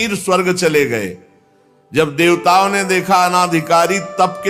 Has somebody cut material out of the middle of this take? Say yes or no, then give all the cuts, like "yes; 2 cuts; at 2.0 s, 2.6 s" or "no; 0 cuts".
no; 0 cuts